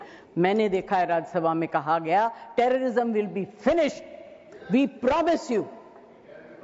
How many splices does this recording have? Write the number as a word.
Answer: zero